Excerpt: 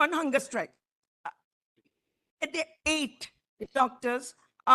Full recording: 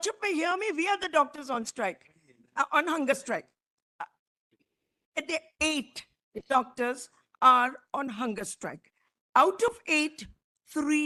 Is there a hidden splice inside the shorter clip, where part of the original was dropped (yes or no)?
no